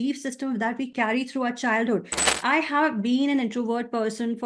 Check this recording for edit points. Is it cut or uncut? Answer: cut